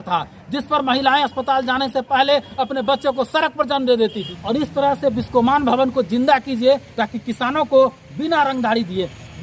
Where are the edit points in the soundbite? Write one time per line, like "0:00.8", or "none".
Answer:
0:04.3